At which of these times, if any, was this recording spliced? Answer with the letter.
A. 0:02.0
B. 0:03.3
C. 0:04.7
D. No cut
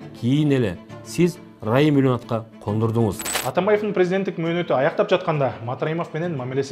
B